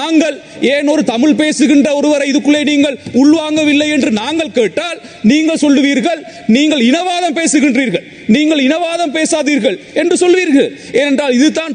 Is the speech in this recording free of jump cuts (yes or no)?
yes